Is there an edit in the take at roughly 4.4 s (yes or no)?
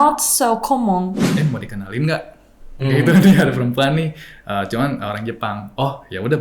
no